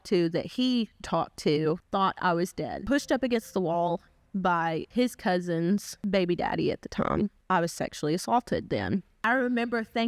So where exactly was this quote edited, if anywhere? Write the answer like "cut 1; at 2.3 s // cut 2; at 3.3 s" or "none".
cut 1; at 1.8 s // cut 2; at 2.8 s // cut 3; at 4.9 s // cut 4; at 5.9 s // cut 5; at 7.2 s // cut 6; at 9.1 s